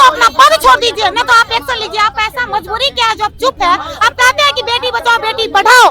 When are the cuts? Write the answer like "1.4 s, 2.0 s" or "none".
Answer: none

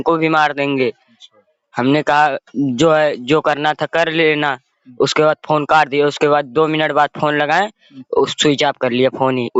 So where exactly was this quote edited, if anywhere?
none

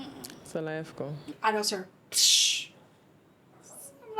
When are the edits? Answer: 1.4 s

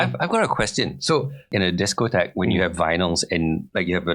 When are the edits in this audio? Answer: 1.5 s

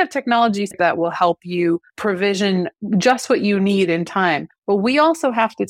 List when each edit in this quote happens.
0.8 s, 1.9 s, 2.8 s, 4.5 s

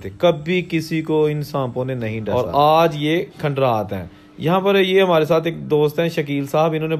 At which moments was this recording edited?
2.2 s

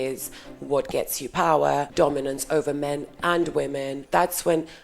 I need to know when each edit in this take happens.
1.9 s, 4.0 s

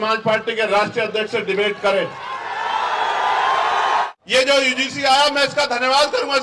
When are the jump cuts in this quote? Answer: 4.1 s

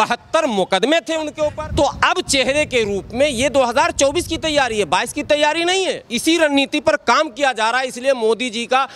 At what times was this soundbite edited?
1.6 s, 6.1 s

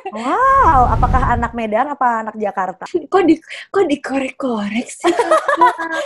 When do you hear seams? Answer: 2.8 s

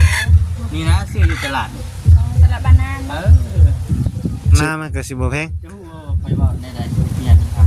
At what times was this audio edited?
4.6 s

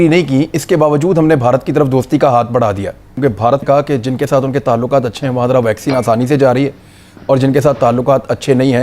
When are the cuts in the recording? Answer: 3.2 s

